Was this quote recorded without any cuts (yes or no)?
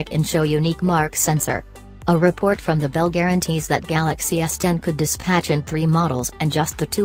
no